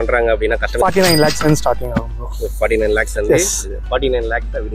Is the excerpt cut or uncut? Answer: uncut